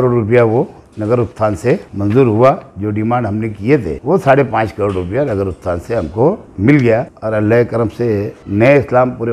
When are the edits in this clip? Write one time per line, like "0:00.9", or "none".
0:01.9
0:03.9
0:06.5
0:07.1
0:08.4